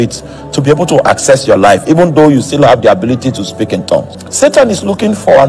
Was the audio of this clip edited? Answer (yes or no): yes